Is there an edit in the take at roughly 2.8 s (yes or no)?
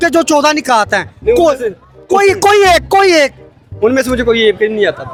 no